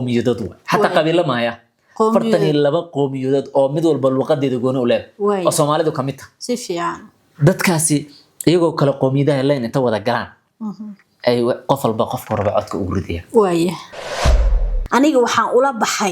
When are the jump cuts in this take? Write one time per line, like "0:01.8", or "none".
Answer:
0:14.2